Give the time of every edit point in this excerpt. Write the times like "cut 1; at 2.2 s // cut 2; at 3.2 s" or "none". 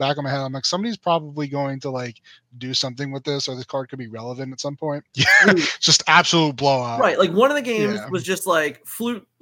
cut 1; at 5.1 s